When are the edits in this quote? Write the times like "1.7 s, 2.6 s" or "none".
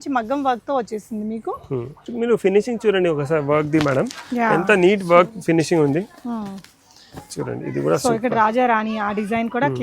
2.0 s